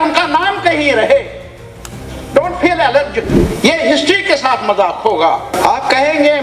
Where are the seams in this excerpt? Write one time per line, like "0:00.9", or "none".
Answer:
0:03.4
0:05.5